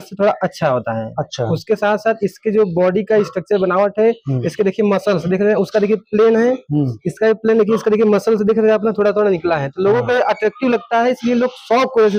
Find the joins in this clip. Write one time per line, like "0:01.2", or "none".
none